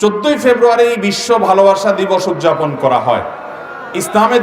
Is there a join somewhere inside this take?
no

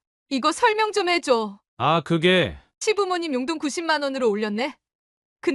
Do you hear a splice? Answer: yes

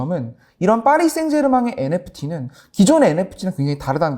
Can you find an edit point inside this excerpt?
no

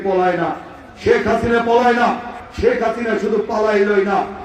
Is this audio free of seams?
no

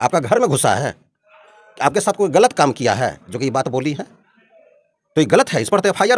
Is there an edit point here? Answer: no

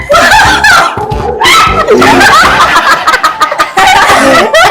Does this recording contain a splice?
no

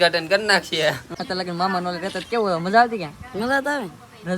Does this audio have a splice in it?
yes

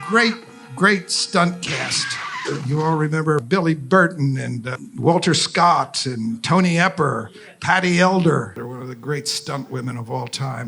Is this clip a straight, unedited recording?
no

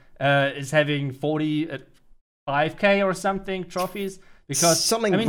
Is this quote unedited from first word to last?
yes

